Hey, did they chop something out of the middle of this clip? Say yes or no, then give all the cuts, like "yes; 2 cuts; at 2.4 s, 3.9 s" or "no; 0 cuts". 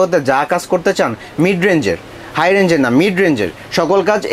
no; 0 cuts